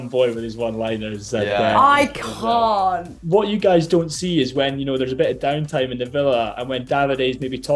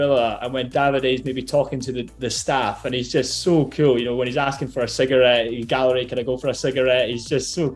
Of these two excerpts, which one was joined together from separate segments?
first; 1 cut; at 3.1 s

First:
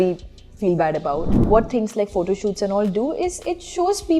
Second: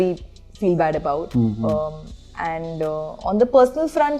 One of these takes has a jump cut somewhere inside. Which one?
first; 1 cut; at 1.4 s

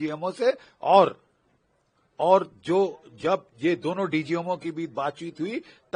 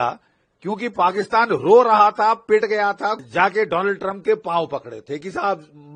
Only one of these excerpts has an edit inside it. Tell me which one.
second; 1 cut; at 3.2 s

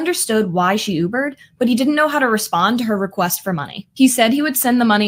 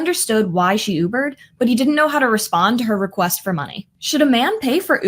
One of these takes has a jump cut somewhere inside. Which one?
second; 1 cut; at 3.8 s

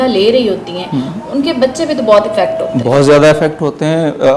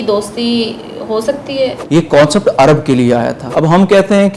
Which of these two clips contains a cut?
second; 2 cuts; at 1.8 s, 3.4 s

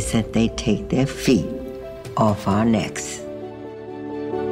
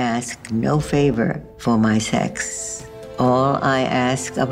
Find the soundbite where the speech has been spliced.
first; 1 cut; at 2.9 s

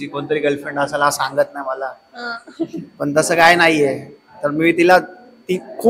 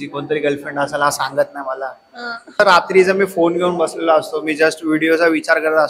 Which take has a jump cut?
second; 1 cut; at 2.5 s

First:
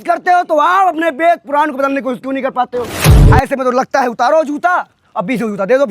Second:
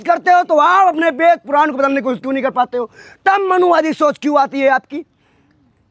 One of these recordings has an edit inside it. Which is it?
first; 1 cut; at 3.0 s

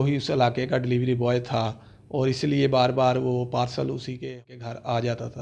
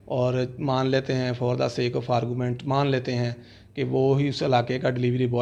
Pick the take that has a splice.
first; 1 cut; at 4.3 s

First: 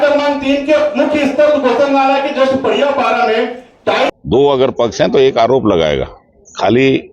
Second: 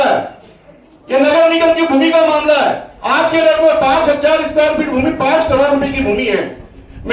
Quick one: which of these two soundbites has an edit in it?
first; 1 cut; at 4.1 s

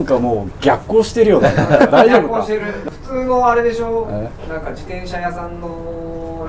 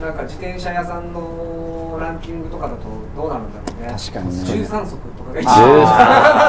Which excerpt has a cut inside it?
first; 1 cut; at 2.7 s

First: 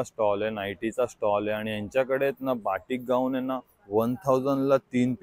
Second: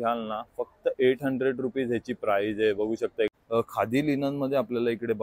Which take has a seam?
second; 1 cut; at 3.3 s

